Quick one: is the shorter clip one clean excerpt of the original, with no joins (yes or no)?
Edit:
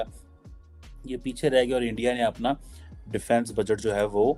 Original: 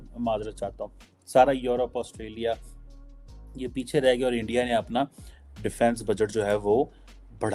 yes